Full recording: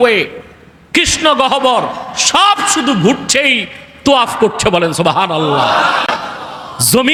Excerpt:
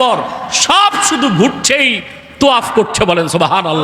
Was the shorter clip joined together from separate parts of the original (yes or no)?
no